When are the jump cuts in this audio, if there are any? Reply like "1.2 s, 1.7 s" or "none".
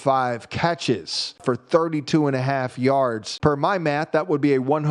1.4 s, 3.3 s